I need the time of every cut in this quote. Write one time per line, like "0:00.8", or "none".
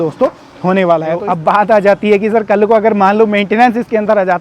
0:01.2